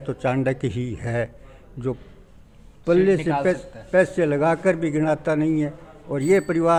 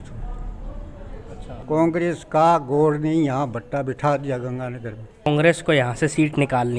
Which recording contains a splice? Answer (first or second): second